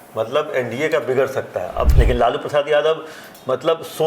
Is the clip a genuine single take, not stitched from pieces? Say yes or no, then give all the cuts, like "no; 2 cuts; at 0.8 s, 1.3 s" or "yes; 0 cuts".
no; 1 cut; at 1.9 s